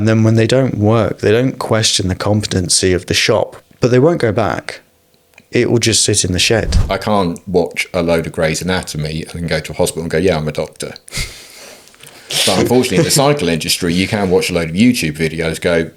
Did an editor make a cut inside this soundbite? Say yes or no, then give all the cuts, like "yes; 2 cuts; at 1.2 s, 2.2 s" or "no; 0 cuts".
yes; 2 cuts; at 3.6 s, 6.8 s